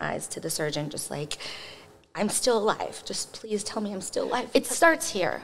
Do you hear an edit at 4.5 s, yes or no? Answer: yes